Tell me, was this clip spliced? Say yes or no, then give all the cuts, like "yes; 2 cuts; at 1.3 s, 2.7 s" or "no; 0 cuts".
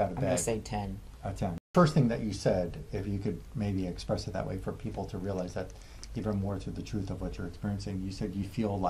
yes; 1 cut; at 1.7 s